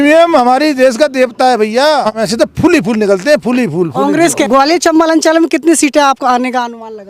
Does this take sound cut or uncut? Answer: cut